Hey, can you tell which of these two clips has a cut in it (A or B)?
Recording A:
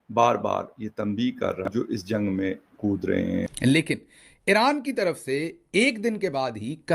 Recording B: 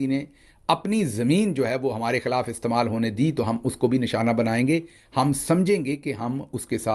A